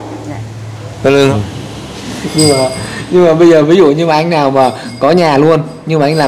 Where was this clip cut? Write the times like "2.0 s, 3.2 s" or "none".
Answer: 1.3 s